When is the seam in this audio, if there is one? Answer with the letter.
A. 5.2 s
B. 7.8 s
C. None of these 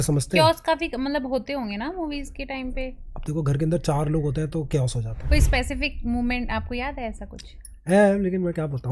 A